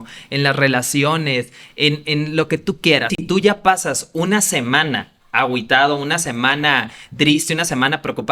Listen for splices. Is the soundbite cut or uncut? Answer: cut